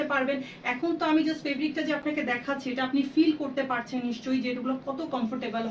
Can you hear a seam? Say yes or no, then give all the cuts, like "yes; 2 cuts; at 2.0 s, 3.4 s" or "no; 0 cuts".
no; 0 cuts